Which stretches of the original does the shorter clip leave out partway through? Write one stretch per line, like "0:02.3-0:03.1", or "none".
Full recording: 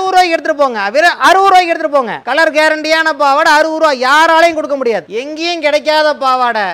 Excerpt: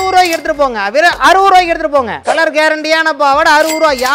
none